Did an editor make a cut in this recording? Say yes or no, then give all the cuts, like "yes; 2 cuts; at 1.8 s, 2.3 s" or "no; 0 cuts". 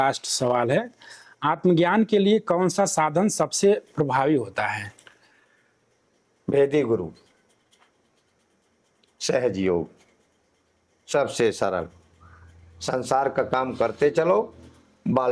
no; 0 cuts